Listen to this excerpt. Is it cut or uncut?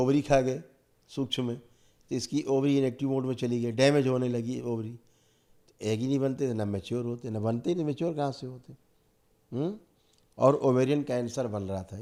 uncut